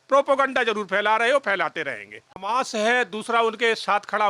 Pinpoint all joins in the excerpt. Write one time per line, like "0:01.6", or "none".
0:02.3